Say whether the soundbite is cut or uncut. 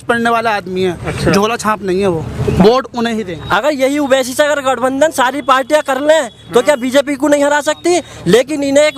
cut